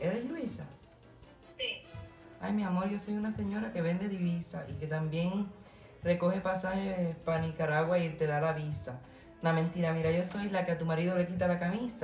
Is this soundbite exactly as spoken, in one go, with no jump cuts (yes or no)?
yes